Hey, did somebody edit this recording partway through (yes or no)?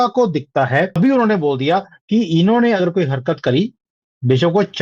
yes